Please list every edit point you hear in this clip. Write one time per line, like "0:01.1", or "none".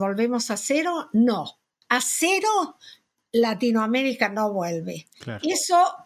none